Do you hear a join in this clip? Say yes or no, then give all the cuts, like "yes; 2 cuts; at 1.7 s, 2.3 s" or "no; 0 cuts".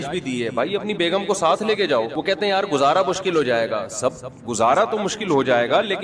yes; 1 cut; at 2.1 s